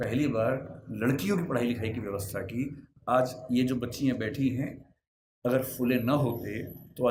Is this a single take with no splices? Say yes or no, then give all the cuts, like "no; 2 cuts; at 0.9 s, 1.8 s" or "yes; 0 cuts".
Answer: yes; 0 cuts